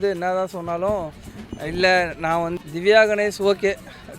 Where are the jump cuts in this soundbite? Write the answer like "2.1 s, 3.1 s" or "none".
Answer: 2.5 s